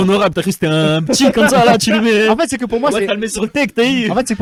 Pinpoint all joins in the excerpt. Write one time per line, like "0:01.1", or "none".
none